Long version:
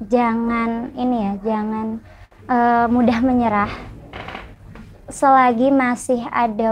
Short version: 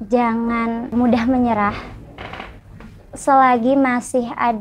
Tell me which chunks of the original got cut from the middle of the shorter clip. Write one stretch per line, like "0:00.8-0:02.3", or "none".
0:00.9-0:02.9